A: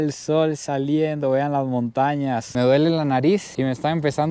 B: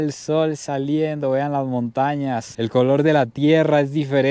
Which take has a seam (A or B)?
A